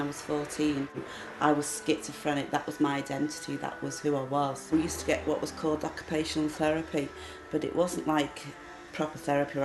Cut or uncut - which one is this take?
cut